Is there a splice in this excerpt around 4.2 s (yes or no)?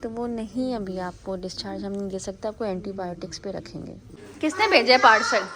yes